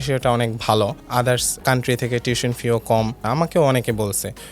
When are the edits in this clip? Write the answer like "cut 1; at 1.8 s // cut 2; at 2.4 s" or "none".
cut 1; at 1.0 s // cut 2; at 3.2 s